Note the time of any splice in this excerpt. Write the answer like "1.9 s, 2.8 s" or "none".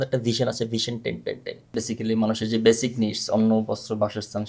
1.8 s